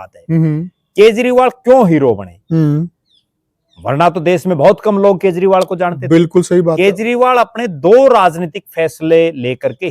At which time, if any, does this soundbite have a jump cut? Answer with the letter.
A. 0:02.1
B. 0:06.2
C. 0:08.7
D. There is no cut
D